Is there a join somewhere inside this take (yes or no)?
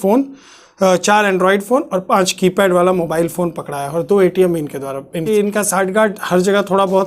yes